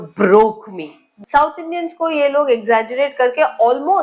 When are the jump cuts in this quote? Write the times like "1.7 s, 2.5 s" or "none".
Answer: 1.2 s

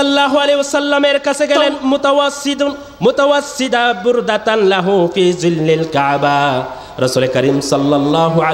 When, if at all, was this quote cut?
1.7 s

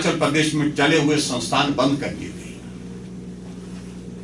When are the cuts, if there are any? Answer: none

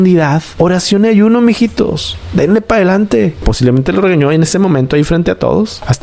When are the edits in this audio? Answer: none

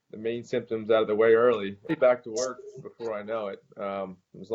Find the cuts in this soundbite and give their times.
1.7 s

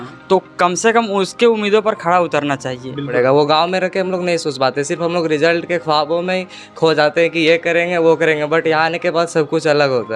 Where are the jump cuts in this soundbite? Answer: 3.1 s

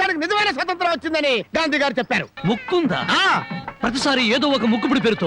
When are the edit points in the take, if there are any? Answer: 2.3 s

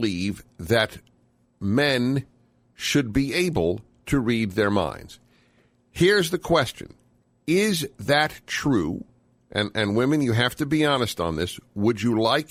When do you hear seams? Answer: none

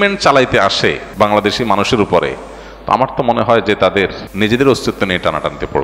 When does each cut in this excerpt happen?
1.0 s, 4.2 s

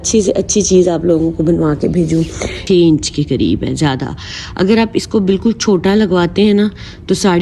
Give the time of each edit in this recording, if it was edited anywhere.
2.6 s

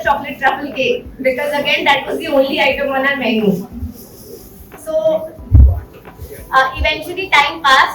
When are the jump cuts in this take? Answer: none

